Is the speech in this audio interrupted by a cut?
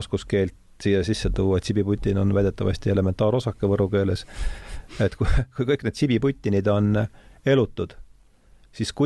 no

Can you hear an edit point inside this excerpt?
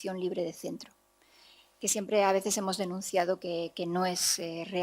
no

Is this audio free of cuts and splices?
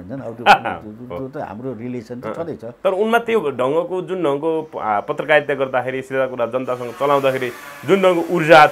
yes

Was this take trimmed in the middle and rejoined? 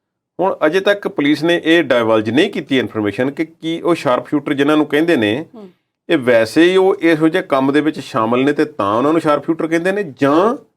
no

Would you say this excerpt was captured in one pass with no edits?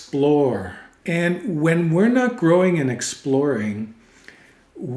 no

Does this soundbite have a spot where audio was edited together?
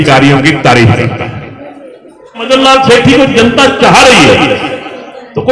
yes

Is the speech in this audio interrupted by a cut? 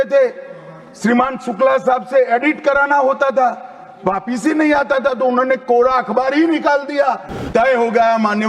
yes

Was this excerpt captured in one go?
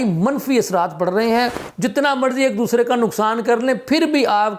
no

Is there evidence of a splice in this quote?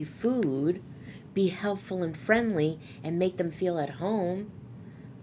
no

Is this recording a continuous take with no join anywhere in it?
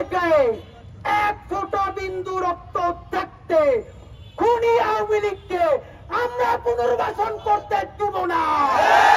yes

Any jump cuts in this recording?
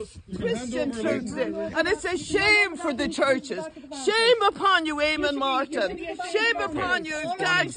no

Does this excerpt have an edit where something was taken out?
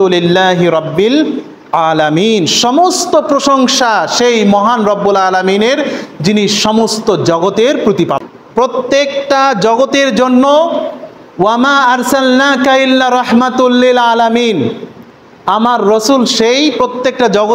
yes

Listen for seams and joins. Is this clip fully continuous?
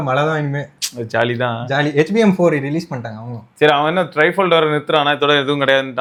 yes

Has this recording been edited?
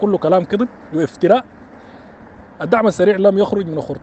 no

